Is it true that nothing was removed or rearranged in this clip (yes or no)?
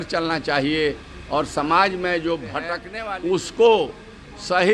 no